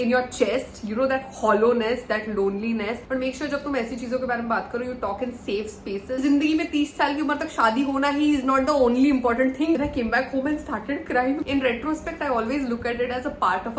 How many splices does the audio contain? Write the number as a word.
four